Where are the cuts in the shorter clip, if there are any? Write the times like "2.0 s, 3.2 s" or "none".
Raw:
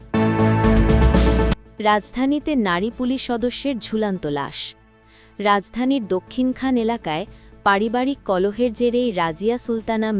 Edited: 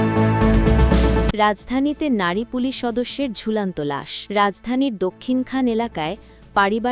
1.3 s, 4.1 s